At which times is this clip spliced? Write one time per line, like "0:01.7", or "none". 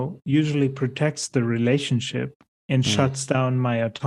none